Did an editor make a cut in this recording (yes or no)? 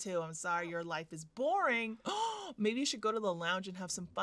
no